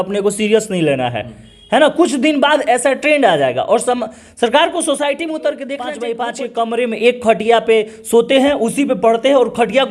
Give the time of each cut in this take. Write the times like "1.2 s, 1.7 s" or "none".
5.9 s

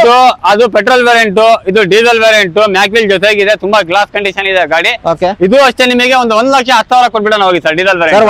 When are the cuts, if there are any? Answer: none

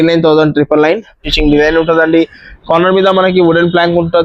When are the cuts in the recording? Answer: 1.2 s

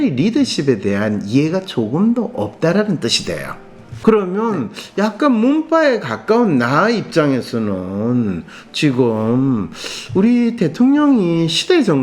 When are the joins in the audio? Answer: 3.9 s

